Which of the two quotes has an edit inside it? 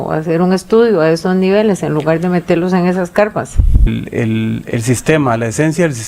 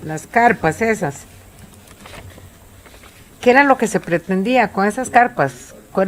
first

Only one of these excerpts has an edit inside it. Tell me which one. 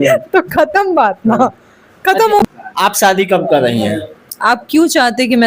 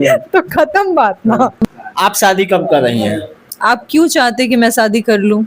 second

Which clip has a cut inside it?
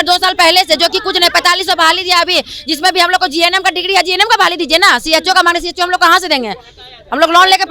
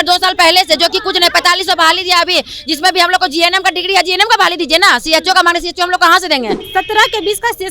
second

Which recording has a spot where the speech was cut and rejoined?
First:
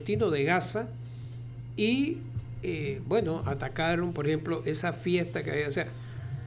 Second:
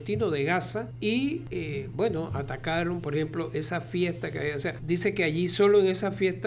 second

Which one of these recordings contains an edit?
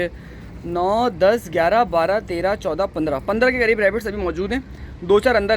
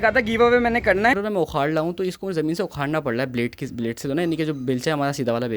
second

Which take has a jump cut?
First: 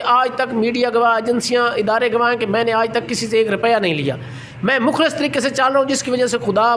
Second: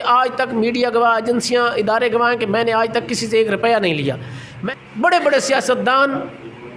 second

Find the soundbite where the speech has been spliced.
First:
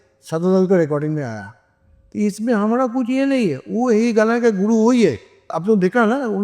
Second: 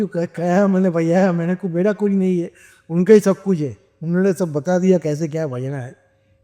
first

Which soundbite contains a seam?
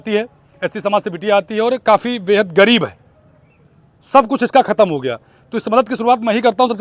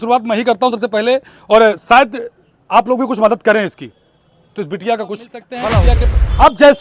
second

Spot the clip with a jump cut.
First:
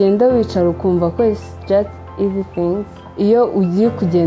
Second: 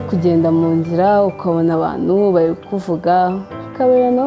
first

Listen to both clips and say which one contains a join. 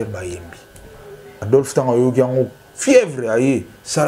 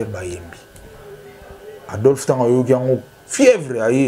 first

